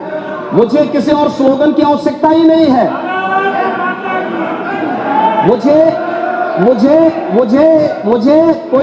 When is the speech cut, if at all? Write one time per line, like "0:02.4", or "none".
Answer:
none